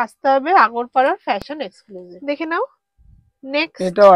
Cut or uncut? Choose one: uncut